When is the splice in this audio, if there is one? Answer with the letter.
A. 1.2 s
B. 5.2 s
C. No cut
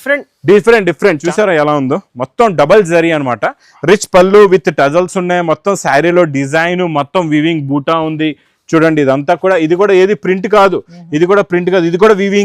A